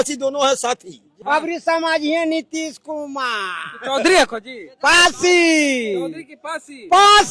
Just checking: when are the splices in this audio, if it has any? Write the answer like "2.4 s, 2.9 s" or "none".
1.1 s